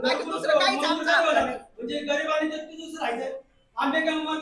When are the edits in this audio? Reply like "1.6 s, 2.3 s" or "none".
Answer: none